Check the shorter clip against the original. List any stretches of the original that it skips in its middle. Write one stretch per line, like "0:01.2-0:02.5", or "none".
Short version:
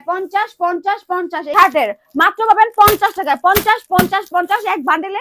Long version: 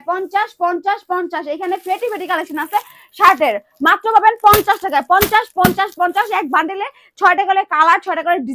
0:01.5-0:03.1